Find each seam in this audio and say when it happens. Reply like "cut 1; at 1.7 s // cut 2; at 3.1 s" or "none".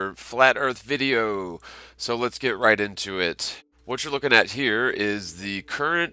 cut 1; at 3.5 s